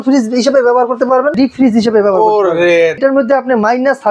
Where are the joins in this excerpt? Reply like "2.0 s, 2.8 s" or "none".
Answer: 1.3 s, 3.0 s